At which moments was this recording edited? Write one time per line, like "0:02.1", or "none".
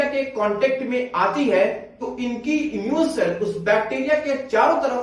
none

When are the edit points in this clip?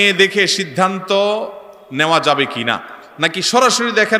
none

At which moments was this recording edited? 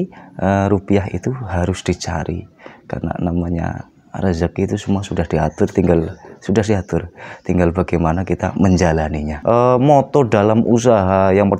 0:09.3

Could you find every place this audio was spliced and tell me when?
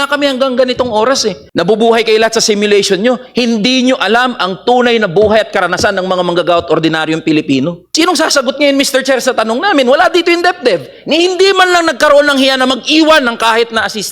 0:01.4
0:07.8

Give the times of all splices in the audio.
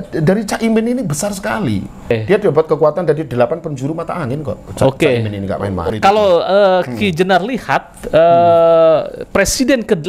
0:02.1
0:05.8

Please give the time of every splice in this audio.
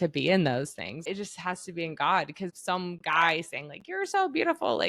0:01.1
0:02.6

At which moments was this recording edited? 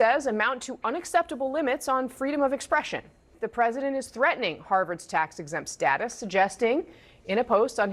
0:03.4

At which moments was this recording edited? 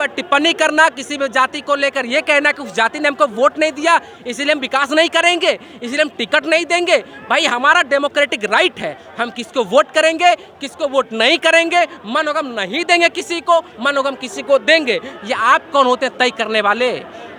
none

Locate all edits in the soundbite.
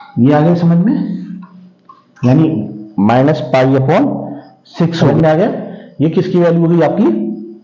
0:05.1

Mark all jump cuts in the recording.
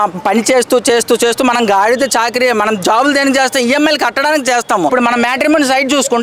0:04.9

